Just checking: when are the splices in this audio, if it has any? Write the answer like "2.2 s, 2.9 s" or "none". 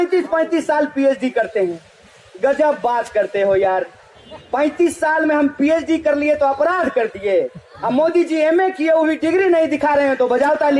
none